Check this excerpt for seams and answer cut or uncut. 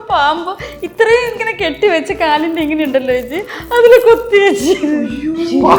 uncut